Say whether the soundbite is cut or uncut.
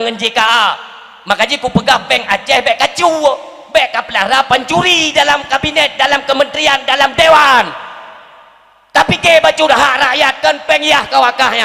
uncut